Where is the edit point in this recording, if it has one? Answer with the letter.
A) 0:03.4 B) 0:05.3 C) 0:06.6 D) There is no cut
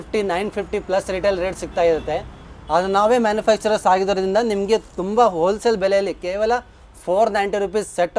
D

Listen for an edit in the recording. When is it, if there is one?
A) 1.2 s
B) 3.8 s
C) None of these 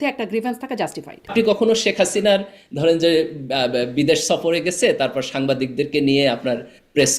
A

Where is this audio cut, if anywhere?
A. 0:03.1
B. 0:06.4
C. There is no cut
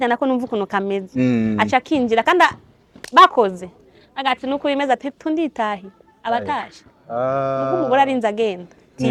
C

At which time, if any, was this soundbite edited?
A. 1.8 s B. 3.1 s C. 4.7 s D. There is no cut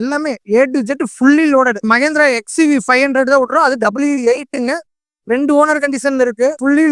A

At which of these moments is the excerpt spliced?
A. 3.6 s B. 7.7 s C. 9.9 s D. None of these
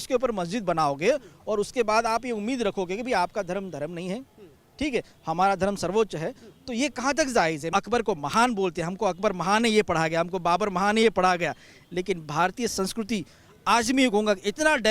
B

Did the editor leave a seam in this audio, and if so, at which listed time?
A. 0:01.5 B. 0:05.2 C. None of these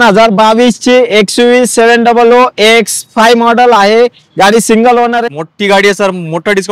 B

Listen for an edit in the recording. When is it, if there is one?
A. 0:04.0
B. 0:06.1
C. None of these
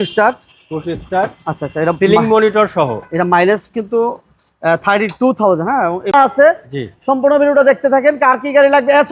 B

